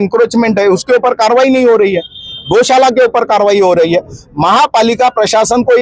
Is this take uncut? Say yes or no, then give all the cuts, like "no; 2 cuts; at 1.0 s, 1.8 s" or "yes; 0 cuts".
yes; 0 cuts